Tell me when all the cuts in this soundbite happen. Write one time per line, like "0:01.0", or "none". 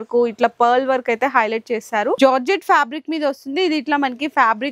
0:02.2